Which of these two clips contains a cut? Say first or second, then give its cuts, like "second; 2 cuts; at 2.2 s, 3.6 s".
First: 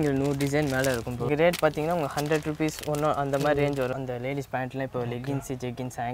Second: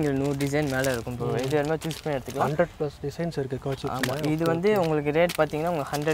first; 2 cuts; at 1.3 s, 4.0 s